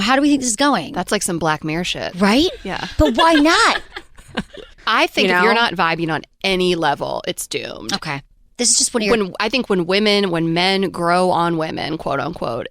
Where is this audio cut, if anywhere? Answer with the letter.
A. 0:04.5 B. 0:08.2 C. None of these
A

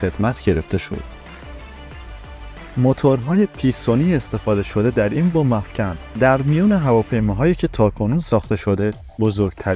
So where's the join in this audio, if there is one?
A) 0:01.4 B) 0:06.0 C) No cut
B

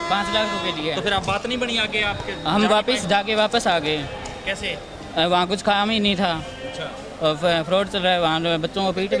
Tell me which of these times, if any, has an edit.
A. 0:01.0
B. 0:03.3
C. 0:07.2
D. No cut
D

